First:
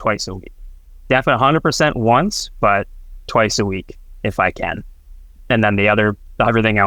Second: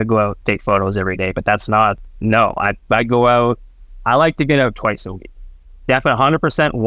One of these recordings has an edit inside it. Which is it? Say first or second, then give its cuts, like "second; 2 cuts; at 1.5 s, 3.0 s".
second; 1 cut; at 2.1 s